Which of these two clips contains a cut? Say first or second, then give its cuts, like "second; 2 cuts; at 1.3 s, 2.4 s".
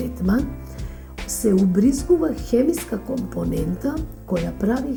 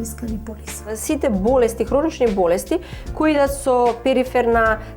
second; 1 cut; at 1.0 s